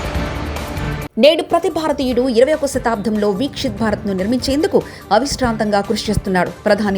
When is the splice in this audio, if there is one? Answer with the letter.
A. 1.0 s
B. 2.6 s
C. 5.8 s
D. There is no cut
A